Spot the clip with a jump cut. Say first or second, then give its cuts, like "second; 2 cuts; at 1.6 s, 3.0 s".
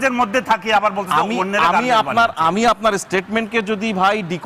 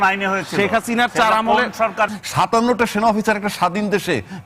second; 1 cut; at 2.2 s